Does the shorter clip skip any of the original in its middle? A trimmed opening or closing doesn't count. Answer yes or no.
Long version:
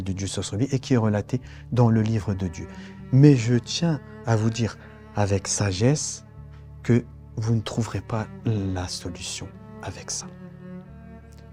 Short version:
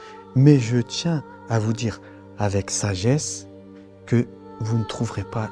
no